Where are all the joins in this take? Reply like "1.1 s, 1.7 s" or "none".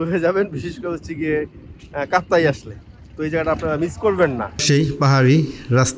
4.6 s